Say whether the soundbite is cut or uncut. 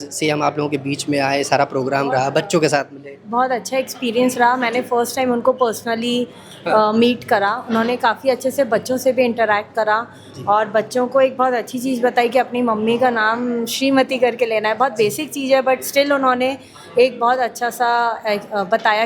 uncut